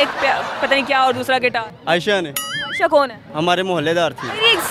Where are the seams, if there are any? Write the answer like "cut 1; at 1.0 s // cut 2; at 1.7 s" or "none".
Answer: cut 1; at 1.7 s // cut 2; at 3.2 s